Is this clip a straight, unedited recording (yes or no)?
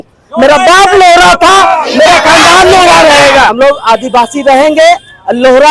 no